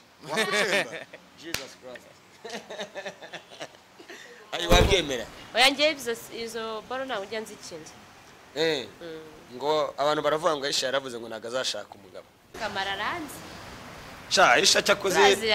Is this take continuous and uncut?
no; 1 cut; at 12.6 s

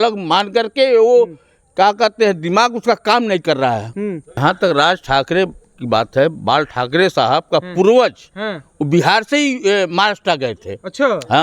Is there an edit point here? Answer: yes; 1 cut; at 4.4 s

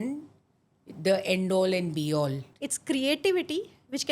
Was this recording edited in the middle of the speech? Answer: yes; 1 cut; at 2.5 s

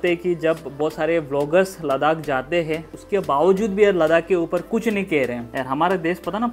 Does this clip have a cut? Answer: yes; 2 cuts; at 3.0 s, 5.5 s

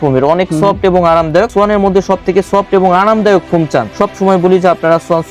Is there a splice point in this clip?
yes; 2 cuts; at 1.5 s, 3.9 s

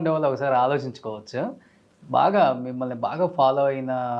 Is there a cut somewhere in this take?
no; 0 cuts

